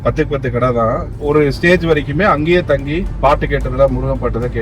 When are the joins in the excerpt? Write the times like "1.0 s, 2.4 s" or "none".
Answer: 3.1 s